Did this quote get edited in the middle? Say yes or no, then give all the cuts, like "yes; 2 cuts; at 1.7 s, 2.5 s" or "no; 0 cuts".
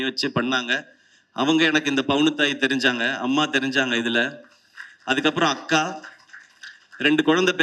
no; 0 cuts